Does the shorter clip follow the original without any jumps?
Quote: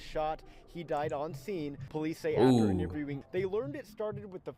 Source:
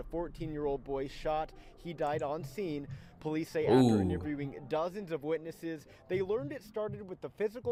no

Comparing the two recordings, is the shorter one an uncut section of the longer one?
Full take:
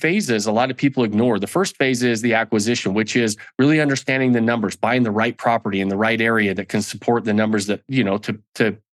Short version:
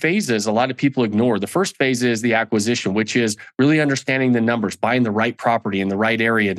yes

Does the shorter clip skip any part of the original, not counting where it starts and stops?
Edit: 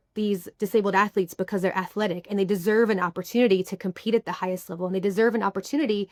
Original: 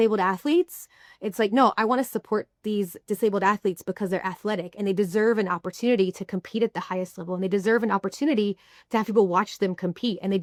no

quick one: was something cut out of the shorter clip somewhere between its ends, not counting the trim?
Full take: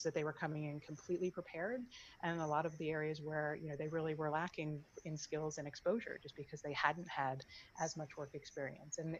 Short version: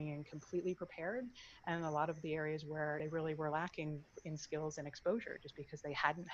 yes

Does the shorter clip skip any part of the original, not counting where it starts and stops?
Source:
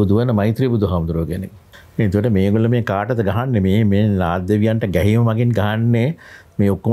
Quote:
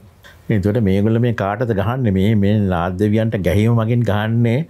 no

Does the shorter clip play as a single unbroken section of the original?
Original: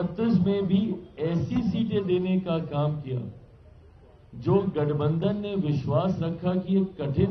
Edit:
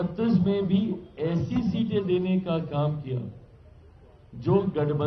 yes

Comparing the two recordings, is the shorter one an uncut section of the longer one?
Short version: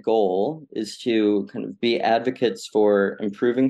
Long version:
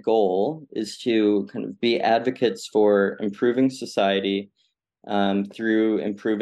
yes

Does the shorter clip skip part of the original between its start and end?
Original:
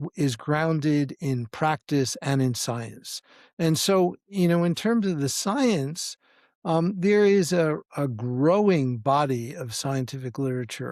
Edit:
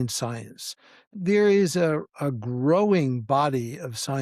yes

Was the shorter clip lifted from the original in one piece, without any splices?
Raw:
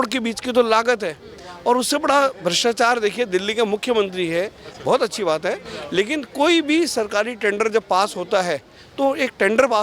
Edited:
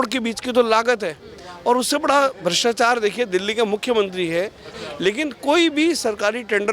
no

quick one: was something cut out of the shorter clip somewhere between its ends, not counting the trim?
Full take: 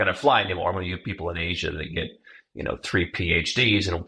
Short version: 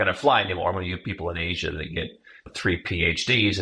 yes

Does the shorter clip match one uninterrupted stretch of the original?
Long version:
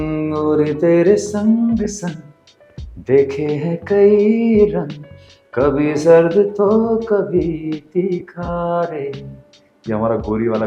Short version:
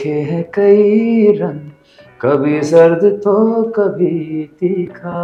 yes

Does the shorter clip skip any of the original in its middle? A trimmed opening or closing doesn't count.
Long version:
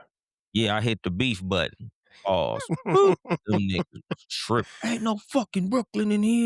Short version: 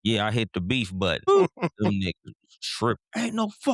yes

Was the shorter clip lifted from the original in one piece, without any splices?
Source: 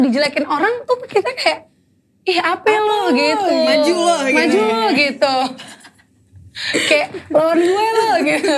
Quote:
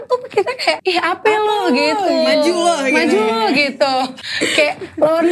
no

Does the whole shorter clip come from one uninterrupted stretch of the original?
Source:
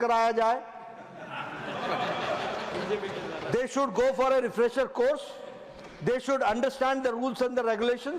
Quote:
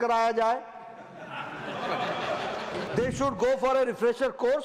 no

